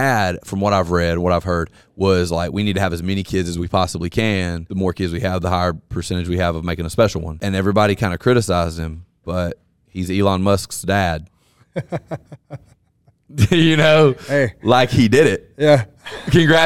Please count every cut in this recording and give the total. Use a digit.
2